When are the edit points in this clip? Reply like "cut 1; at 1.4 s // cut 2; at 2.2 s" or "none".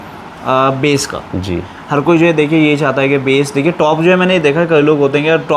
none